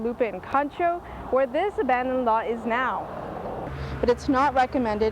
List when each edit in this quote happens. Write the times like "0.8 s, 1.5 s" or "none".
3.7 s